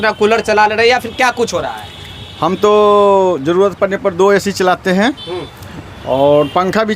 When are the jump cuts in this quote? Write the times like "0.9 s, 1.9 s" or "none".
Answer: none